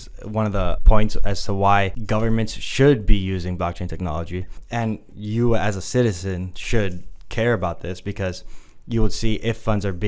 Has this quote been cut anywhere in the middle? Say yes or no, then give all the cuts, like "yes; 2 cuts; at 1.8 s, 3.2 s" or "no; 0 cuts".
yes; 3 cuts; at 0.8 s, 2.0 s, 4.5 s